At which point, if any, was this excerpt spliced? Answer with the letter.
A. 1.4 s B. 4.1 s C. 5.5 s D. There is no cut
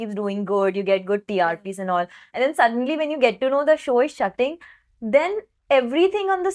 D